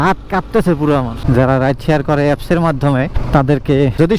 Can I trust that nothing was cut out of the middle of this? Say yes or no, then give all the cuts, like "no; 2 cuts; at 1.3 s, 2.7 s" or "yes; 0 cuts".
no; 1 cut; at 1.2 s